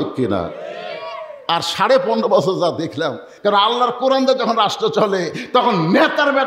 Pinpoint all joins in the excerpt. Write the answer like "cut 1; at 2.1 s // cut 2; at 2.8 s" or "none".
cut 1; at 3.3 s